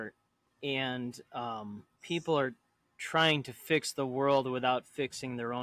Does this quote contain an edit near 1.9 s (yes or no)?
yes